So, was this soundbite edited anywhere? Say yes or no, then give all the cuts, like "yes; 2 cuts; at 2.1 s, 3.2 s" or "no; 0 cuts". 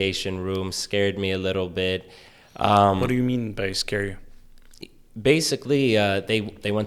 no; 0 cuts